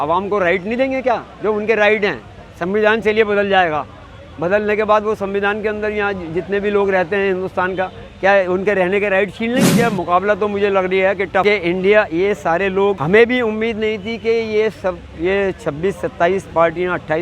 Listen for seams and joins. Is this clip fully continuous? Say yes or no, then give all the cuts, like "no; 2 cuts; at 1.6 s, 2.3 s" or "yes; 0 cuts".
no; 3 cuts; at 9.7 s, 11.4 s, 13.0 s